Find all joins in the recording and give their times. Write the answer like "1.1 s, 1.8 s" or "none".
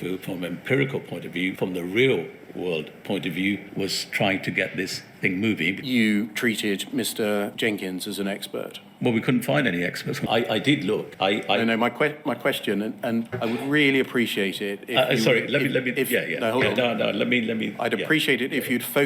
1.5 s, 3.7 s, 5.8 s, 7.5 s, 10.2 s, 11.1 s, 13.3 s